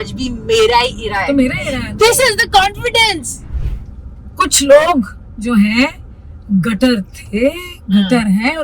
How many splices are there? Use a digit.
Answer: 1